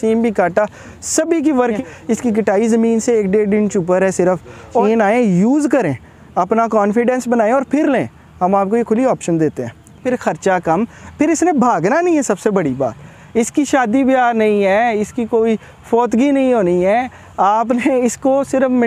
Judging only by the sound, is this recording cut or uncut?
cut